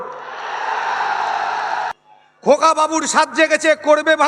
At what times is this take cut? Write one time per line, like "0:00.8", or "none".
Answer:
0:01.9